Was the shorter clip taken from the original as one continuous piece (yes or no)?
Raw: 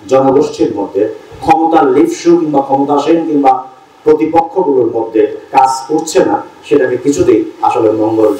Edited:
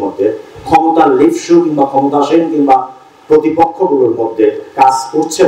yes